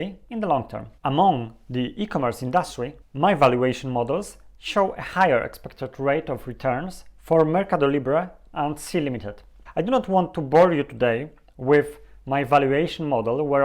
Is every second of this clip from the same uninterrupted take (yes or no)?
yes